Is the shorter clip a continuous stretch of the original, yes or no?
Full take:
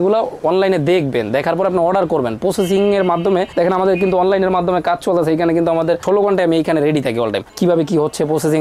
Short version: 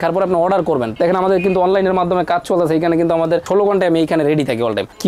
no